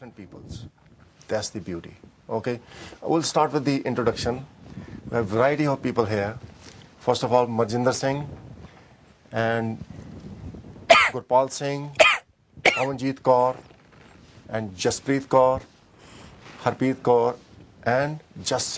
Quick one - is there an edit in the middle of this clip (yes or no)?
yes